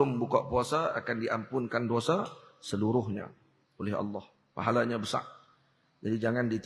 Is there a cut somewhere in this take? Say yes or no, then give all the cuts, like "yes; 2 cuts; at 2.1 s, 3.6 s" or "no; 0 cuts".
no; 0 cuts